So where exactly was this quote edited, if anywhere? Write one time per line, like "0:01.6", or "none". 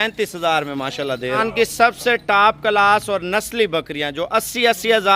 0:01.4